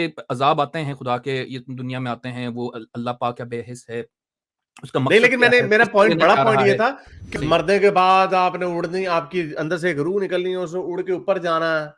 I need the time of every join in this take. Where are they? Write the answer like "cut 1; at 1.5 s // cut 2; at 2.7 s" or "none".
cut 1; at 7.4 s